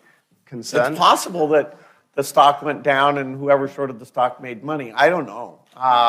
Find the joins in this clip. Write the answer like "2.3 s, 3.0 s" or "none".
none

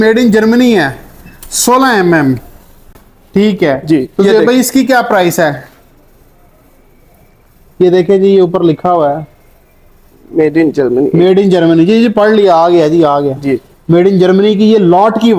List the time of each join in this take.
none

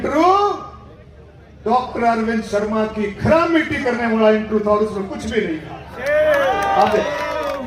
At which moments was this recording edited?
none

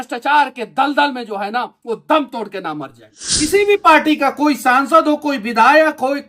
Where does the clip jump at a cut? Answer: 3.5 s

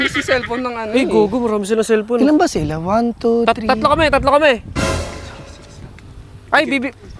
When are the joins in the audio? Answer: none

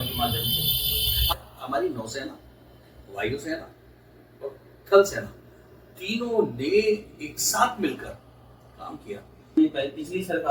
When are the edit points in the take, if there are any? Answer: 1.2 s, 9.6 s

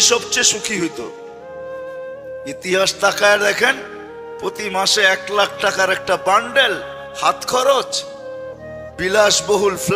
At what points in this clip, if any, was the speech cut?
none

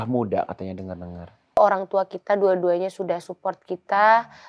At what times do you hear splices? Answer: 1.6 s

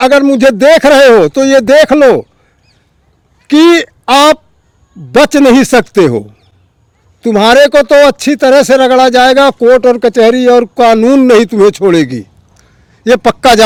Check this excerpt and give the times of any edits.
none

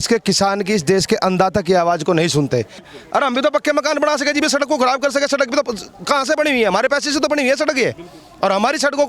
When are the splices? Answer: 2.9 s

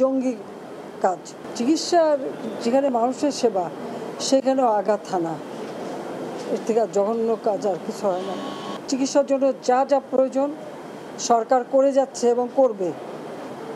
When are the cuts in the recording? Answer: none

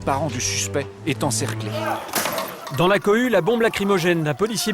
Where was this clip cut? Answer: 1.8 s

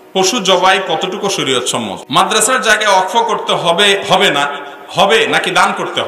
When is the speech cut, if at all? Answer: 2.0 s

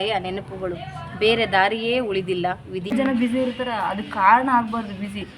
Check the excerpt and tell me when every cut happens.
2.9 s

